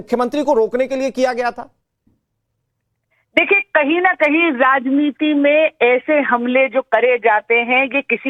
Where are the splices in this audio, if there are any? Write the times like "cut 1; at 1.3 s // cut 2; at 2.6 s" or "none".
none